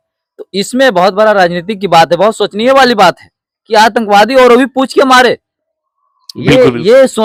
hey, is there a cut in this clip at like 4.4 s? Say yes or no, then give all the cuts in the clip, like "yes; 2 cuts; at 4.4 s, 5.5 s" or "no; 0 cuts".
no; 0 cuts